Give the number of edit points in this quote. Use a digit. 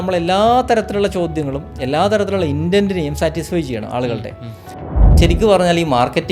1